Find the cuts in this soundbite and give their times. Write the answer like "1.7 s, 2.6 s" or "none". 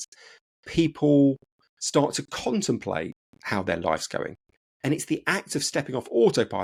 none